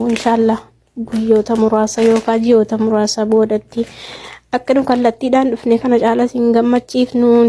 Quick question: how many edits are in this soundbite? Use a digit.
0